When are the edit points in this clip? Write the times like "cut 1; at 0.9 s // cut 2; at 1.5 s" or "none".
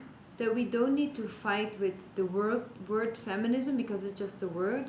none